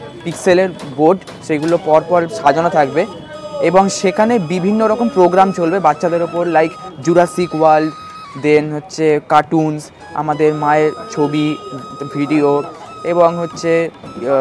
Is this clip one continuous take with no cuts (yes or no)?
yes